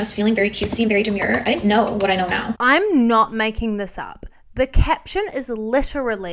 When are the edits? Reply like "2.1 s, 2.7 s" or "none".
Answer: 2.5 s